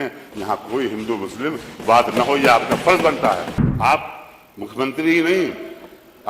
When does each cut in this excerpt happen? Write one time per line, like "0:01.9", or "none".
0:03.6